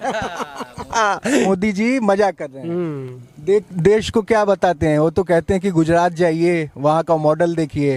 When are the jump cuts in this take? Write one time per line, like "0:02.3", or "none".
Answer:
none